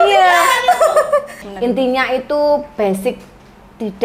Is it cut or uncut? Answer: cut